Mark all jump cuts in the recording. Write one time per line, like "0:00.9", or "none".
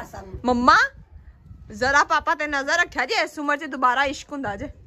none